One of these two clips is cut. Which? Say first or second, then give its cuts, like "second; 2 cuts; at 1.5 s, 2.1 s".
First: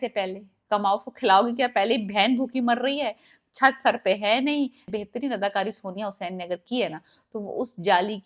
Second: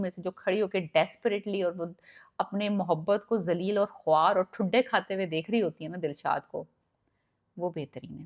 first; 1 cut; at 4.9 s